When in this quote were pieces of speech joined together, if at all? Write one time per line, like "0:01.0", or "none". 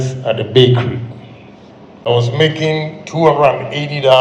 0:02.1